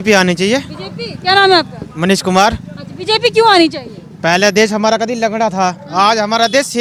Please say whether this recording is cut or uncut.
uncut